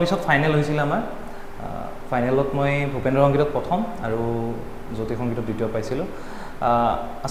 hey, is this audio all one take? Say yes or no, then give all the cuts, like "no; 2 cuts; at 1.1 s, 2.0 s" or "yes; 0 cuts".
yes; 0 cuts